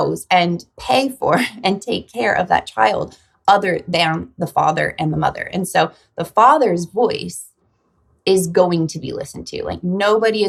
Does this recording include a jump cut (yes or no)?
no